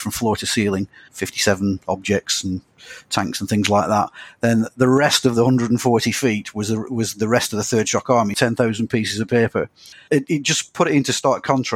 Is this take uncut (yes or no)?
no